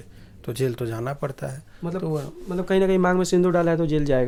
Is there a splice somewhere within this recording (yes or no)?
no